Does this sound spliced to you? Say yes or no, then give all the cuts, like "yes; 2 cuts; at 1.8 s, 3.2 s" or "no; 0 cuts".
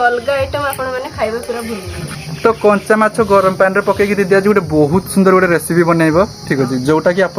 yes; 1 cut; at 2.1 s